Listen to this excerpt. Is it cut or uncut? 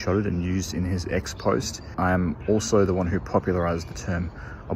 cut